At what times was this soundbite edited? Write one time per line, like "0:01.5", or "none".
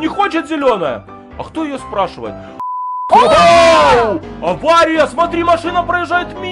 0:02.7